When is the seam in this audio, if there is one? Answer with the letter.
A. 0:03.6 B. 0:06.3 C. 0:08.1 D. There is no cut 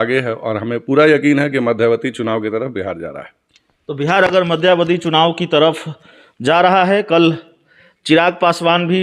D